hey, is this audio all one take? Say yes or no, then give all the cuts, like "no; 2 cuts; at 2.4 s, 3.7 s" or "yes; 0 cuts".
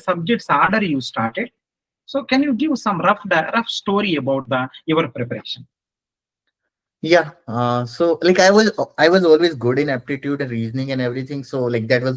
yes; 0 cuts